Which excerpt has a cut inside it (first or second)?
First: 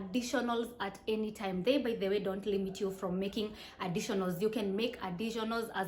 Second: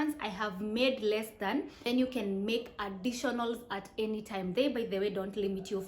second